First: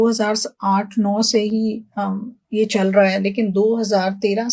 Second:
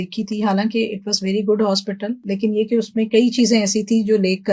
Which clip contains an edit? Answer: second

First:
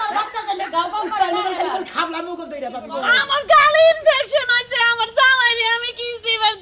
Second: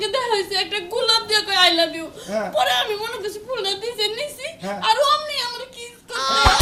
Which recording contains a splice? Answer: first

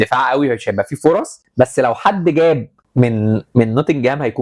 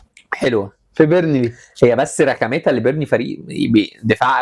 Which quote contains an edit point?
first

